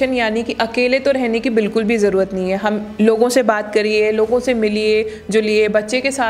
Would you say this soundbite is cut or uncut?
uncut